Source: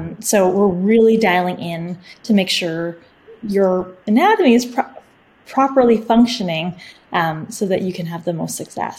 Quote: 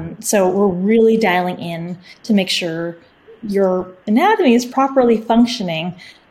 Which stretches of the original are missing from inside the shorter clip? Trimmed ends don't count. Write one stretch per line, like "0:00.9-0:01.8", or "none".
0:04.7-0:05.5